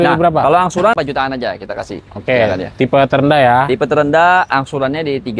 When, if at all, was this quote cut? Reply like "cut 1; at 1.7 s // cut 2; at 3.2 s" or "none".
cut 1; at 0.9 s

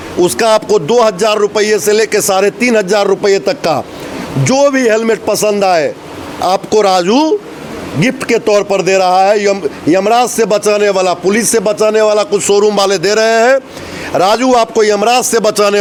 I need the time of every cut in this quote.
none

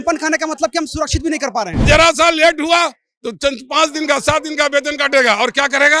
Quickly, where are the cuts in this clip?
cut 1; at 1.8 s

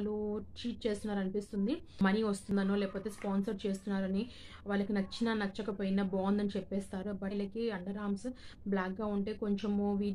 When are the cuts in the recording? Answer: cut 1; at 2.3 s // cut 2; at 7.3 s

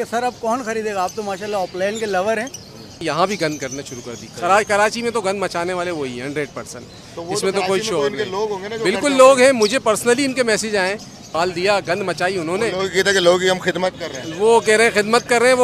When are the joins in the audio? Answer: cut 1; at 3.0 s // cut 2; at 11.3 s

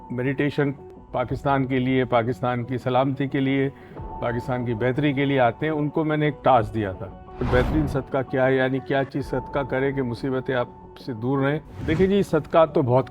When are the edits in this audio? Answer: cut 1; at 7.5 s // cut 2; at 11.9 s

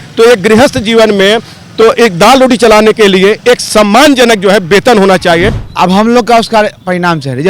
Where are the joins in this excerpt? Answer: cut 1; at 5.6 s

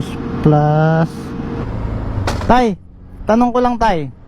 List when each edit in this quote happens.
cut 1; at 1.5 s

